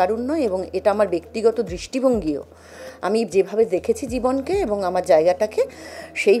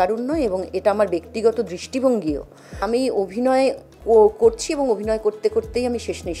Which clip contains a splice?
second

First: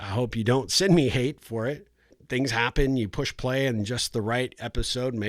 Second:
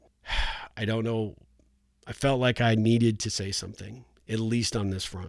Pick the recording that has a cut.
first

